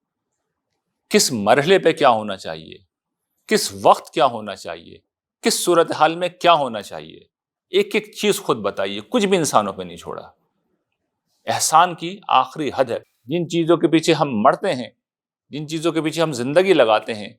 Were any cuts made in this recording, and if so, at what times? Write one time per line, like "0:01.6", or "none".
0:13.1

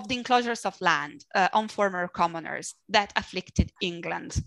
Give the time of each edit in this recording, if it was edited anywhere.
none

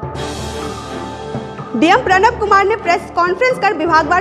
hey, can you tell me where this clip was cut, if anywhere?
0:01.6

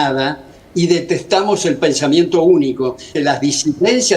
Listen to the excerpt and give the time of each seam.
0:03.1

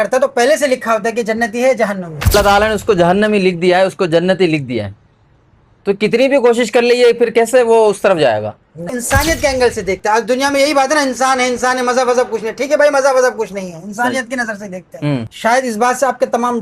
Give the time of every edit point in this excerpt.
0:02.3
0:08.9
0:15.3

